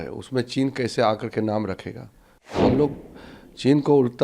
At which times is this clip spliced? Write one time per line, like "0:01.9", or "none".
0:02.6